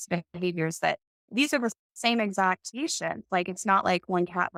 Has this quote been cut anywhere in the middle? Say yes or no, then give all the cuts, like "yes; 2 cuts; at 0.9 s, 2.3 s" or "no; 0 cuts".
no; 0 cuts